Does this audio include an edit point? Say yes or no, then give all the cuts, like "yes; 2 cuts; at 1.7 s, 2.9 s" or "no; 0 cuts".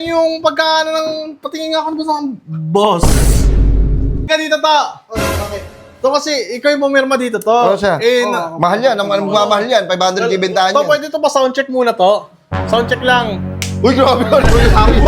yes; 1 cut; at 4.3 s